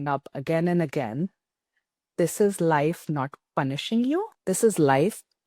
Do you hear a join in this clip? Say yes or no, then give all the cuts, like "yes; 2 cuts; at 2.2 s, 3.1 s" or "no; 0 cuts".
yes; 1 cut; at 4.3 s